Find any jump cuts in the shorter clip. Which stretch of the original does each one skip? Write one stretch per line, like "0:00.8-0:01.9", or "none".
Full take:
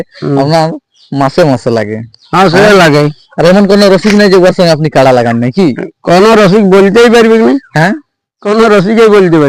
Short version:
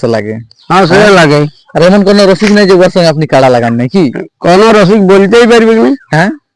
none